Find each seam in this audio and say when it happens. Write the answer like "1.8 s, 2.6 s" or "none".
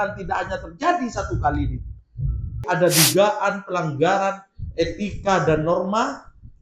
2.6 s

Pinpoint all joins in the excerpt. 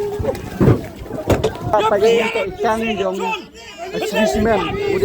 1.7 s

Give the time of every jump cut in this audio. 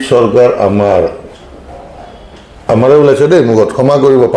none

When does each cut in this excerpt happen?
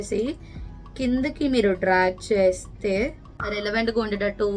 3.2 s

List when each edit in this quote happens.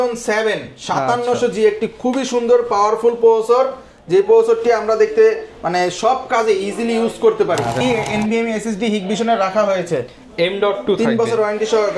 7.8 s

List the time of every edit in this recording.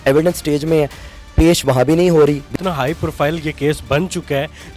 2.6 s

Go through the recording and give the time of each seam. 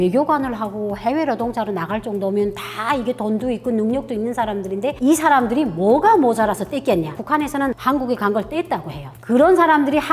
7.2 s, 9.2 s

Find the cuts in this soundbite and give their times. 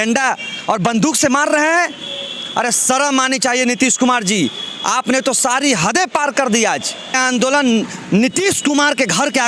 7.2 s

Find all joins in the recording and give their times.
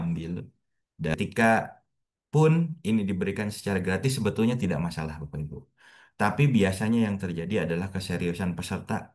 1.1 s

